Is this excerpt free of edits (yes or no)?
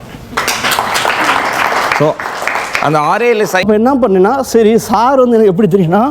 no